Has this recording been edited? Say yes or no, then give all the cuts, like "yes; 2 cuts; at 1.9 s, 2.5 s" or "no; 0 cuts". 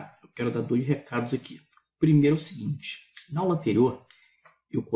no; 0 cuts